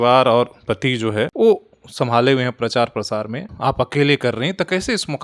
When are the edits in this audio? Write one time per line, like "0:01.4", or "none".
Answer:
0:01.3
0:03.4